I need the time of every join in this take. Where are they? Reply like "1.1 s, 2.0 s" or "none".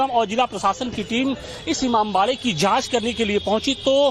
none